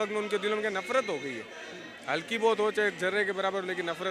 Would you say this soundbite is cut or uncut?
uncut